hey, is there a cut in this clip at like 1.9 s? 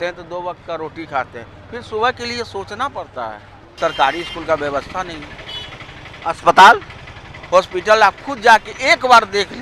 no; 1 cut; at 3.6 s

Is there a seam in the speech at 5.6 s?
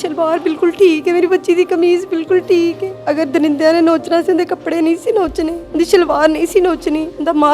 yes; 2 cuts; at 2.9 s, 5.6 s

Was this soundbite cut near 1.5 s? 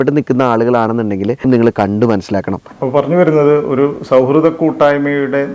yes; 2 cuts; at 1.5 s, 2.6 s

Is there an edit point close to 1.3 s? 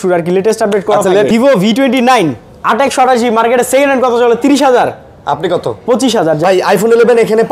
yes; 2 cuts; at 1.3 s, 6.4 s

